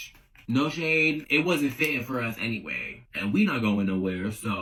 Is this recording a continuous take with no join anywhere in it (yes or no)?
yes